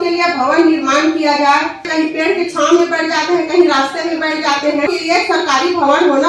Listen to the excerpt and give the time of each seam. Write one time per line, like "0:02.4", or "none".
0:01.9
0:04.9